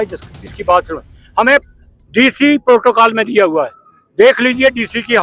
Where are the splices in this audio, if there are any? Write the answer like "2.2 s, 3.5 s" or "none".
none